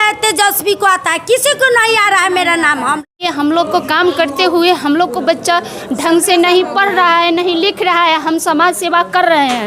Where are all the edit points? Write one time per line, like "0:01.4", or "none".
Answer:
0:03.2